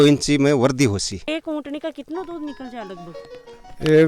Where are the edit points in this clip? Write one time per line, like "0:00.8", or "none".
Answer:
0:01.3

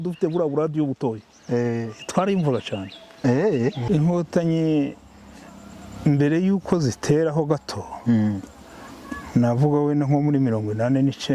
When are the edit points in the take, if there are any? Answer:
0:03.8

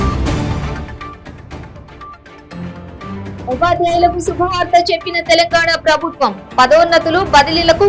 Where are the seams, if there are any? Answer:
0:02.3

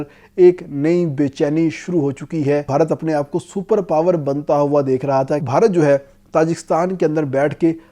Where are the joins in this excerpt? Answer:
0:02.7
0:05.4

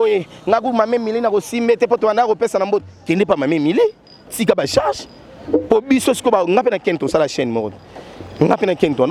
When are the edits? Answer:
none

